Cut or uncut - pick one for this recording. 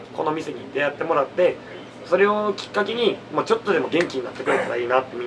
uncut